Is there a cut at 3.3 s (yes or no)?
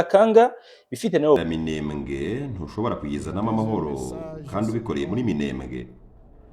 no